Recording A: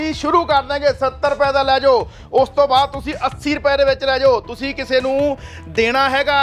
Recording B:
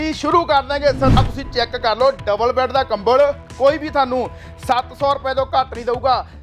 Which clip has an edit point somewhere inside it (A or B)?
B